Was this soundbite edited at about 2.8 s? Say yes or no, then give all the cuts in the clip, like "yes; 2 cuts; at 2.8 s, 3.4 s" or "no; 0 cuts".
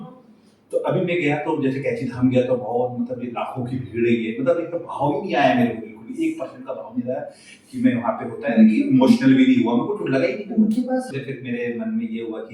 no; 1 cut; at 11.2 s